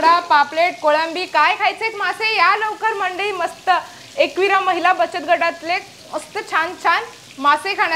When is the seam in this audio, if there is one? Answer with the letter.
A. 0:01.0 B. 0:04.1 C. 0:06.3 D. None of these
D